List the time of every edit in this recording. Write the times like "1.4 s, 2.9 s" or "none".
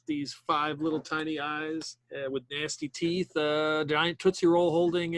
2.0 s